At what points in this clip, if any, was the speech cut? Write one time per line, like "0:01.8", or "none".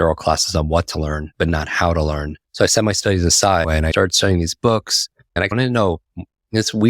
0:01.2
0:02.4
0:03.8
0:05.5